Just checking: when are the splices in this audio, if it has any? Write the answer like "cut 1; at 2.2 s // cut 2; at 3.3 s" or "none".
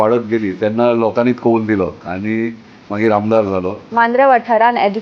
cut 1; at 3.8 s